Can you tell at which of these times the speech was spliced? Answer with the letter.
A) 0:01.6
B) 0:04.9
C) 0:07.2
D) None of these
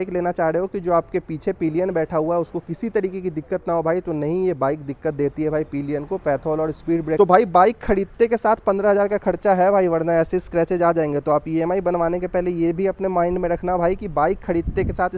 C